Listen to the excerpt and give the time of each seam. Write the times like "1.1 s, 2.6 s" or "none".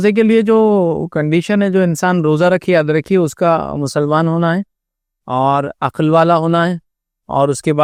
none